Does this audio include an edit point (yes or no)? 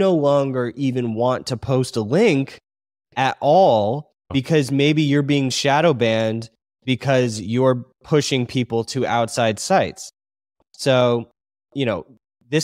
yes